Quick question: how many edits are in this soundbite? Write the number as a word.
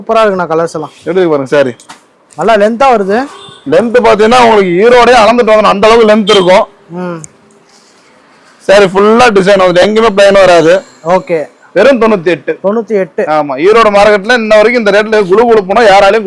zero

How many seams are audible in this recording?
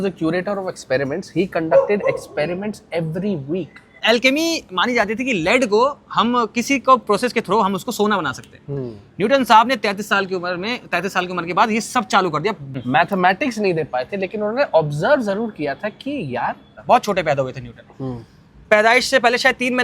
three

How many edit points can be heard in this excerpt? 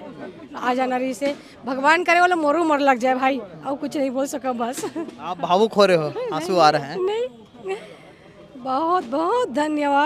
zero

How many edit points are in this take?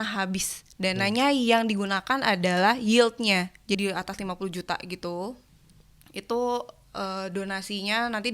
one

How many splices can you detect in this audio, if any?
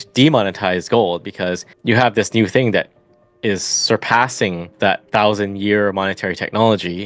two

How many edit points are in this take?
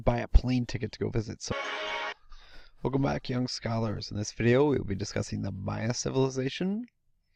zero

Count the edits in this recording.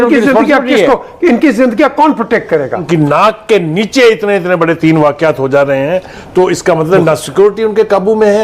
one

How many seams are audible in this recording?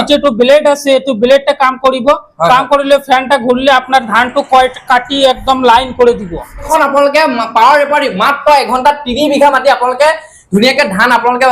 one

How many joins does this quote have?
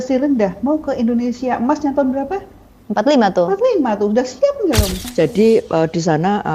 one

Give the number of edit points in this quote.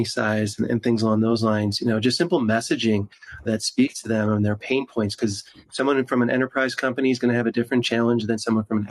one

